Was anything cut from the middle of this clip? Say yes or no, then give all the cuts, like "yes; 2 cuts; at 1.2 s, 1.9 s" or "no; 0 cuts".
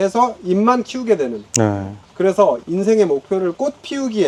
no; 0 cuts